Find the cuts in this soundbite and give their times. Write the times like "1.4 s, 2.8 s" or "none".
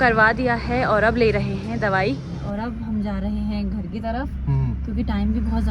2.4 s